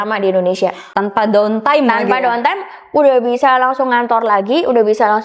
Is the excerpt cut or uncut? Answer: cut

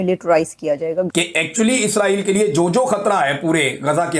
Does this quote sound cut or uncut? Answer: cut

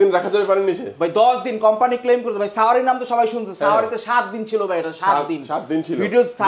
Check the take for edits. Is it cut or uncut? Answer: uncut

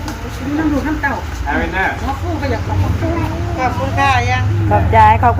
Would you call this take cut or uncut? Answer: uncut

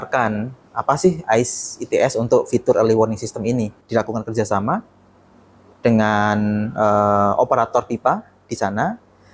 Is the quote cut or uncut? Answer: cut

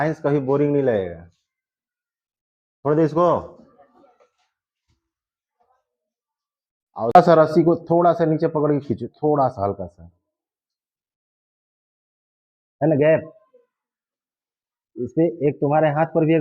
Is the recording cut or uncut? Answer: cut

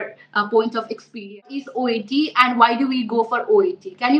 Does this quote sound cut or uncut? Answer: cut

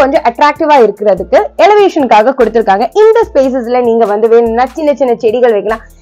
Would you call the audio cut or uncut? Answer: uncut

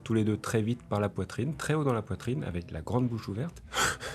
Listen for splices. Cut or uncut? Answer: uncut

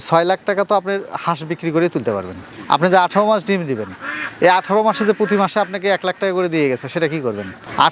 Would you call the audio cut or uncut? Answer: cut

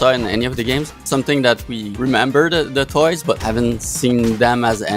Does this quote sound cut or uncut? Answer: cut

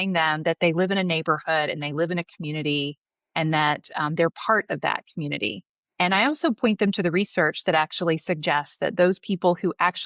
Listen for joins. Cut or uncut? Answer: uncut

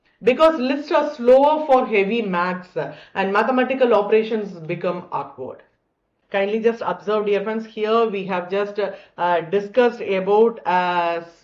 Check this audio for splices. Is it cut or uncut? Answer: cut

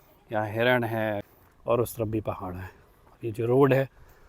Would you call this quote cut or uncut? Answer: cut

